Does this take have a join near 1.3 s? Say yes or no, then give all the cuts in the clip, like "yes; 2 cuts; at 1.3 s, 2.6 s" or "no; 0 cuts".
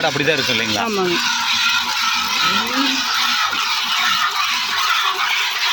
no; 0 cuts